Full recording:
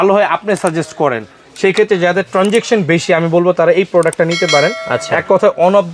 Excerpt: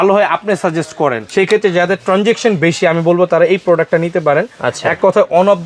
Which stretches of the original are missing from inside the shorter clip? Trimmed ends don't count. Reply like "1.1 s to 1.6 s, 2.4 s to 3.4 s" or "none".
1.2 s to 1.5 s